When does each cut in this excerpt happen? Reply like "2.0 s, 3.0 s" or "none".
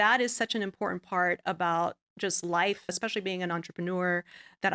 none

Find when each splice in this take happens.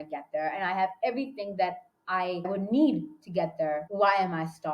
2.5 s, 3.9 s

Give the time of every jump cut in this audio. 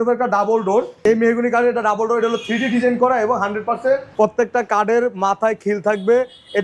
0.9 s, 4.1 s

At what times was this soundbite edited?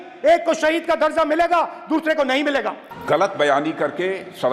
2.9 s

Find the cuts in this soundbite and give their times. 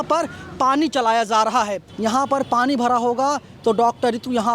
1.9 s

